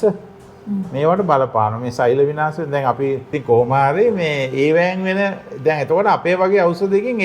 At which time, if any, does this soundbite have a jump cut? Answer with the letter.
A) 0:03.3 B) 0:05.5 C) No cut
A